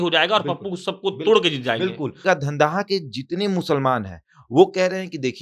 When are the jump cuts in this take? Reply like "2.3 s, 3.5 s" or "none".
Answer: 2.2 s